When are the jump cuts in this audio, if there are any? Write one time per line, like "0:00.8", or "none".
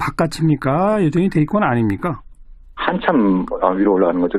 0:02.8